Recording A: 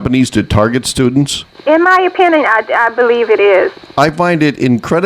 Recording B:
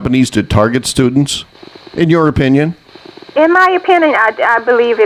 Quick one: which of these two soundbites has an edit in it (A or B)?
A